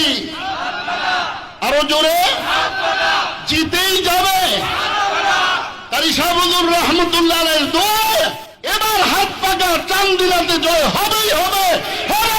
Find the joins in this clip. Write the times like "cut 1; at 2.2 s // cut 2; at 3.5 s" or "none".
cut 1; at 8.5 s